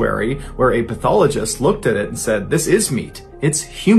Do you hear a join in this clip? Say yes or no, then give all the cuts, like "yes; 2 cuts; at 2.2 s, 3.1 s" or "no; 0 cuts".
no; 0 cuts